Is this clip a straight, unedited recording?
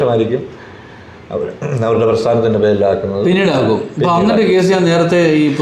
yes; 0 cuts

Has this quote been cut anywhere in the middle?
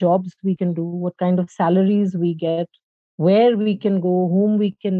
no; 0 cuts

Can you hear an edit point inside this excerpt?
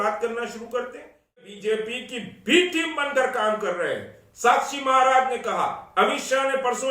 yes; 1 cut; at 1.4 s

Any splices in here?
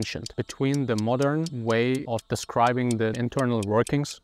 yes; 2 cuts; at 1.5 s, 3.2 s

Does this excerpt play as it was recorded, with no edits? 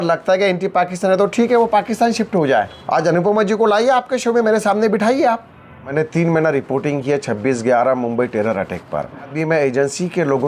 no; 3 cuts; at 2.8 s, 5.9 s, 9.3 s

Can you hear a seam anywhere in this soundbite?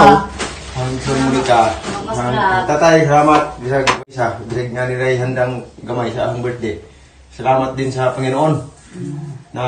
yes; 1 cut; at 4.0 s

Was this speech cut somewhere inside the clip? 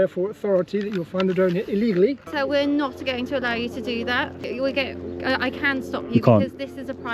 yes; 2 cuts; at 2.3 s, 4.4 s

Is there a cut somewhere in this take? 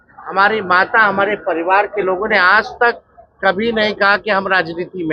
no; 0 cuts

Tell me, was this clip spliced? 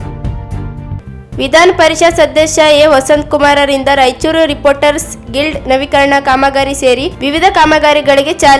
no; 0 cuts

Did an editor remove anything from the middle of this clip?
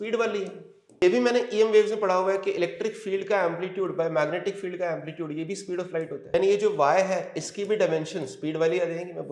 yes; 2 cuts; at 1.0 s, 6.3 s

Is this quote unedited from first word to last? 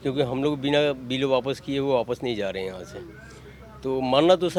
yes; 0 cuts

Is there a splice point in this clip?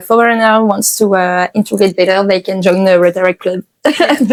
no; 0 cuts

